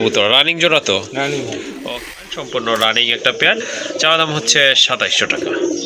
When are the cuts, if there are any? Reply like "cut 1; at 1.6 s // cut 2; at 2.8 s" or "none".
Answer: cut 1; at 1.9 s